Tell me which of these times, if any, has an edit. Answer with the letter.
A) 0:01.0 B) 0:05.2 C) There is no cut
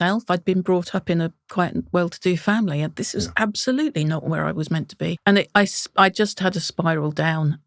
B